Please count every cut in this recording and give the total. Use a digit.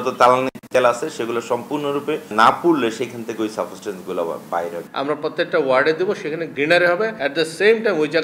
4